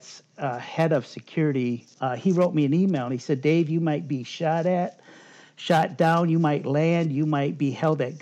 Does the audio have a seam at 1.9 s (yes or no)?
yes